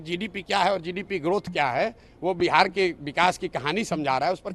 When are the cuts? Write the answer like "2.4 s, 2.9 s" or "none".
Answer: none